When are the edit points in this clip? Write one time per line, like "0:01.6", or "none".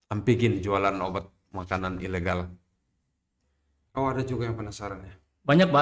0:03.4